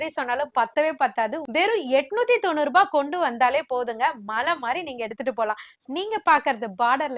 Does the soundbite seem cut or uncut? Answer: cut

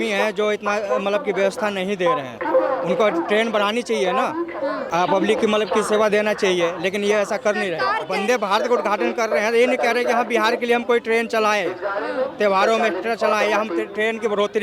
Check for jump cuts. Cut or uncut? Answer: cut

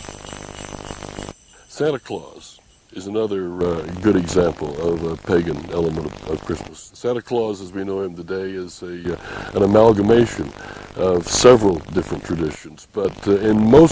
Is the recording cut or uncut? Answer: cut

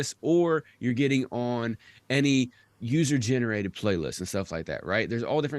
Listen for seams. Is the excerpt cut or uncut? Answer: uncut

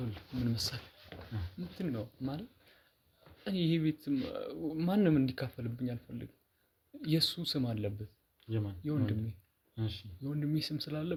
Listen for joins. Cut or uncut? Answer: uncut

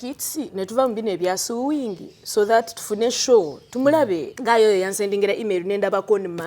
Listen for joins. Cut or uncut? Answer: cut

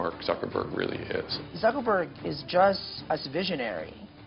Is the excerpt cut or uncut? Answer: cut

